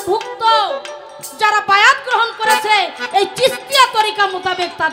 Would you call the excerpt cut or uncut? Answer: uncut